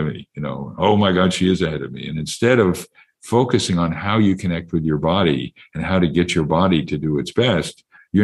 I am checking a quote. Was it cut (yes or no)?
no